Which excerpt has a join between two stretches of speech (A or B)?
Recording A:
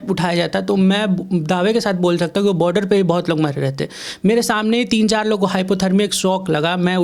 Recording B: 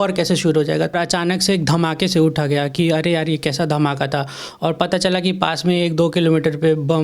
B